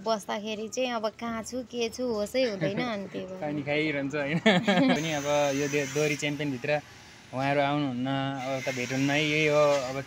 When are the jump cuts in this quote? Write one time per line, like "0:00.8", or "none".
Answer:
0:05.0